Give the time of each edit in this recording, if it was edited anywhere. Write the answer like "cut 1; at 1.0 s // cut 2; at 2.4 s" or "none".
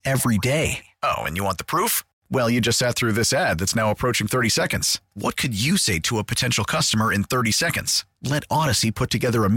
none